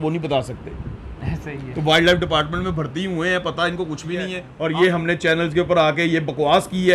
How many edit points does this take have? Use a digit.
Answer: 1